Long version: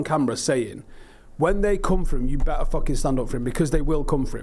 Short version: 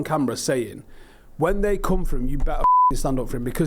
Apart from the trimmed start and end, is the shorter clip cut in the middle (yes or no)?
no